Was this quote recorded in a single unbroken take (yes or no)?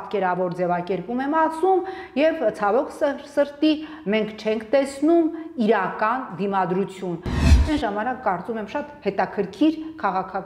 no